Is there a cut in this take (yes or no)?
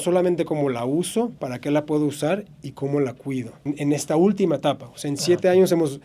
yes